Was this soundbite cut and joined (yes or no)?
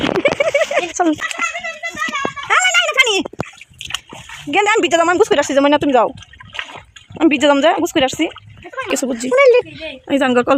yes